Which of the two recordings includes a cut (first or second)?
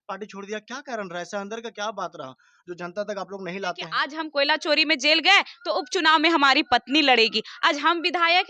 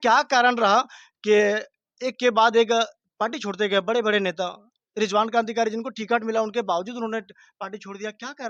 first